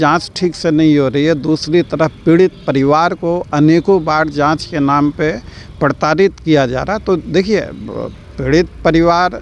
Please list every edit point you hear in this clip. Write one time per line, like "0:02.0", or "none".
none